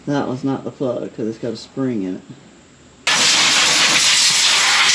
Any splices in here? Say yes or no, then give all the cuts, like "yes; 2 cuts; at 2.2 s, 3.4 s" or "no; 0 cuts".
yes; 1 cut; at 3.1 s